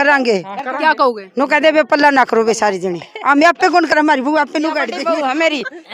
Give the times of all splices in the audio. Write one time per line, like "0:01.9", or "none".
0:04.9